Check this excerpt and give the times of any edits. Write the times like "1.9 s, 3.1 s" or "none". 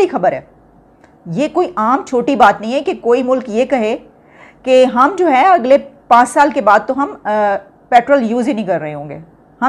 none